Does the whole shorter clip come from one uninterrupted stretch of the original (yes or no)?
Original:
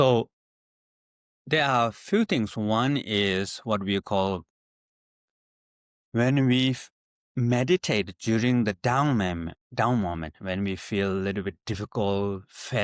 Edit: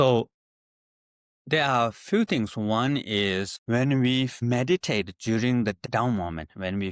no